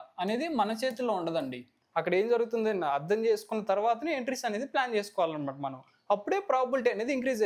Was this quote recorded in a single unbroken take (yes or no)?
no